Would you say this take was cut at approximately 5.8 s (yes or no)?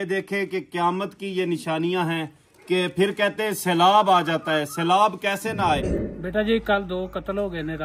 yes